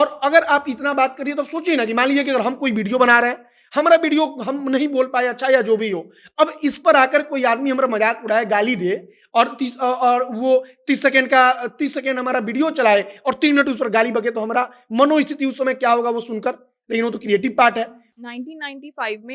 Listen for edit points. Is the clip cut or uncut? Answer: cut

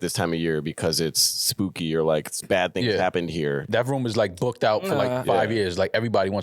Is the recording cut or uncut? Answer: cut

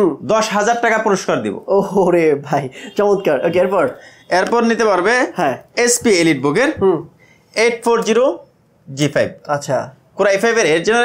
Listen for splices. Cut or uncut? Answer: uncut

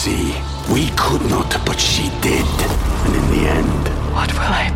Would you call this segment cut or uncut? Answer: uncut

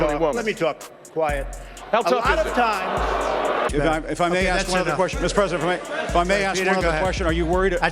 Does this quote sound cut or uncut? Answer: cut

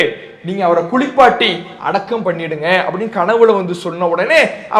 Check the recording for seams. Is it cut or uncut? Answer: uncut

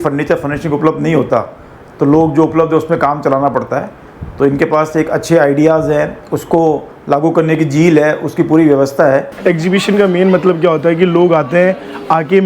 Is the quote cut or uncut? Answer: cut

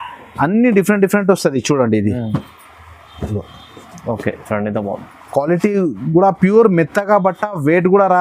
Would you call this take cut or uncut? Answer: uncut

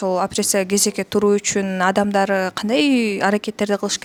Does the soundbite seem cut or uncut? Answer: uncut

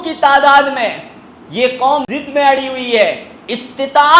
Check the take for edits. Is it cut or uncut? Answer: cut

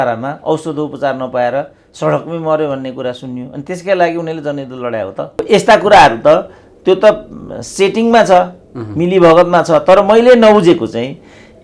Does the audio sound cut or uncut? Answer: cut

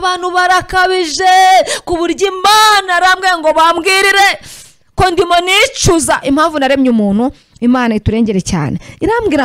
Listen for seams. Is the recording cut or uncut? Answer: uncut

